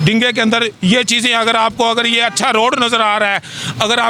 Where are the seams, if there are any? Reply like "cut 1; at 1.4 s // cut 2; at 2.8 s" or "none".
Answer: none